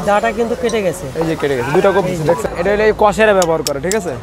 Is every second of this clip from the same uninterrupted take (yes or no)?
no